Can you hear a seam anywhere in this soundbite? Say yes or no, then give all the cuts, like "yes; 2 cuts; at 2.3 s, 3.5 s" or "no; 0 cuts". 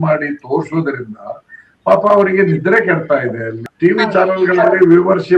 yes; 1 cut; at 3.6 s